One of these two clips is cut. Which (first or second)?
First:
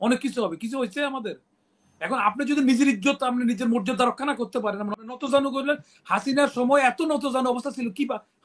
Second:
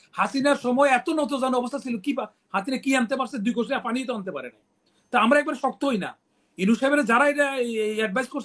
first